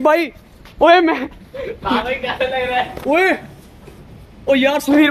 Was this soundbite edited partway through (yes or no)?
no